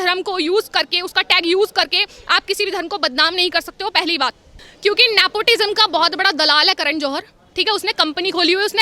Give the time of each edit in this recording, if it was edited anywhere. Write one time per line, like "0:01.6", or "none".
0:04.5